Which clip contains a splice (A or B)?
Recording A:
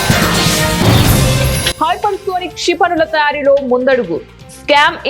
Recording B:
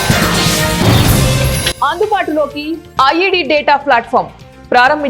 A